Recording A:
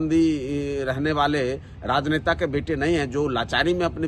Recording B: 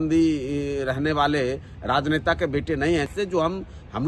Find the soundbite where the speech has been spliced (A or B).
B